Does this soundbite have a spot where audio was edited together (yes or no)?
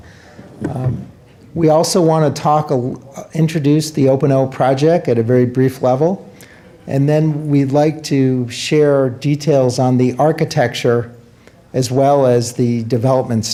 no